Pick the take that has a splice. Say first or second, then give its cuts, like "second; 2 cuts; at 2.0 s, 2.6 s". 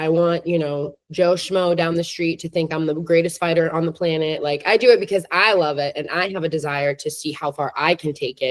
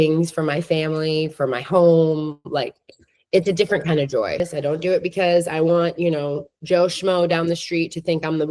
second; 1 cut; at 4.5 s